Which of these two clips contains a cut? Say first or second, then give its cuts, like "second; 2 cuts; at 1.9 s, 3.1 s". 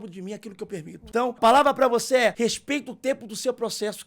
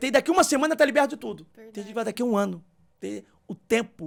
first; 2 cuts; at 1.4 s, 2.3 s